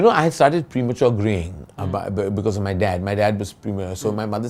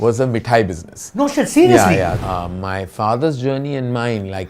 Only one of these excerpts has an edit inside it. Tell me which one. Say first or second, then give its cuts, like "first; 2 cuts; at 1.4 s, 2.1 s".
second; 1 cut; at 2.2 s